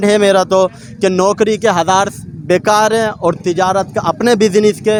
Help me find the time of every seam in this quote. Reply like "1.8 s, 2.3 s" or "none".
none